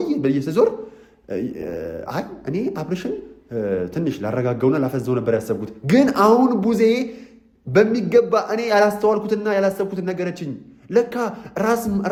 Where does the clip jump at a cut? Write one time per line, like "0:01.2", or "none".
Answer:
none